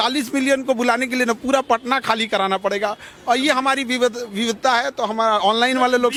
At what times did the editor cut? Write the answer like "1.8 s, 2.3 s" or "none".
none

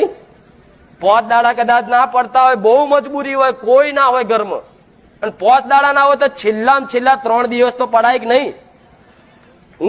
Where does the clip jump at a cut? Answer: none

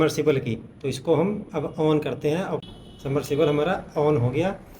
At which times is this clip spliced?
2.7 s

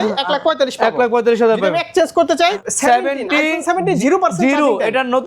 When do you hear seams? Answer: 2.6 s

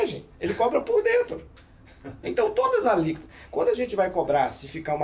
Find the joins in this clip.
none

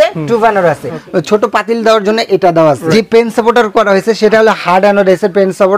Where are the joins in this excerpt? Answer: 1.0 s, 2.8 s

